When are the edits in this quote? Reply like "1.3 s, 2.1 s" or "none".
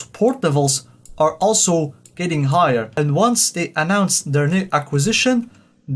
3.0 s